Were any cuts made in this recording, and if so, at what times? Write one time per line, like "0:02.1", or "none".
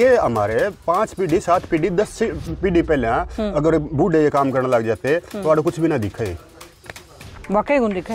none